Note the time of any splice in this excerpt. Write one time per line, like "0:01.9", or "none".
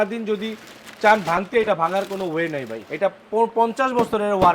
0:02.9